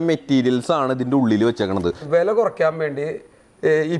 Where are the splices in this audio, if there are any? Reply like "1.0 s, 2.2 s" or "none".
2.0 s